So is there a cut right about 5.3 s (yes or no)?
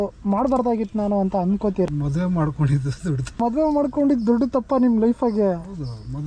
no